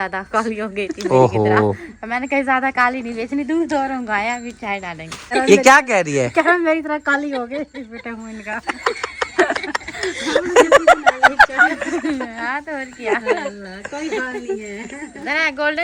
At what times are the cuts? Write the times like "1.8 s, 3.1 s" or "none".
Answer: none